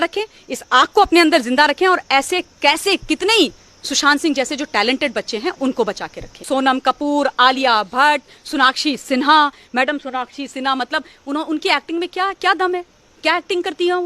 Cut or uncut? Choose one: cut